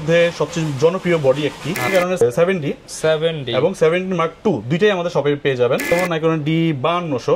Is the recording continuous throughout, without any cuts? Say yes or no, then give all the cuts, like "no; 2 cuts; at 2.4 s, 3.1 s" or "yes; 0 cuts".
no; 2 cuts; at 1.9 s, 5.9 s